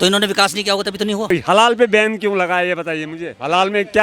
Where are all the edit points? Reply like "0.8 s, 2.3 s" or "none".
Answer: 1.3 s

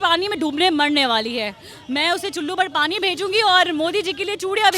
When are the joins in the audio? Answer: none

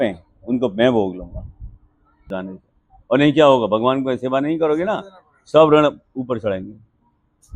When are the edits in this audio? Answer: 2.3 s

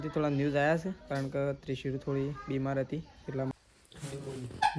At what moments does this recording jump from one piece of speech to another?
3.5 s

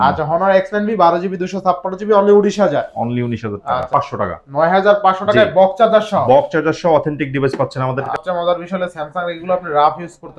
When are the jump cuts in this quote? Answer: 3.9 s, 8.1 s

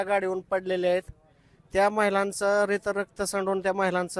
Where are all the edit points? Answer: none

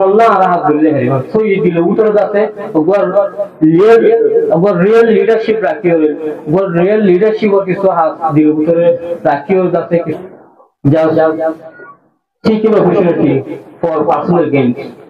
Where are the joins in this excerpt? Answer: 10.1 s

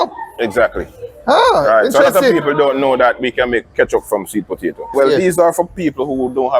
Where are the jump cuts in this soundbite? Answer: 4.9 s

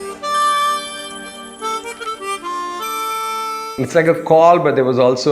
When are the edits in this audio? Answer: 3.8 s

